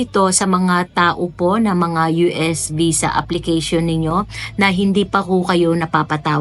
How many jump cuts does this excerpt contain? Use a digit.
0